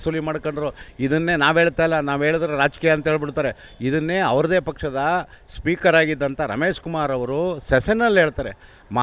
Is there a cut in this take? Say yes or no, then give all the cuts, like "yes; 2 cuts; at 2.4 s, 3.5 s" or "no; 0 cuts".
no; 0 cuts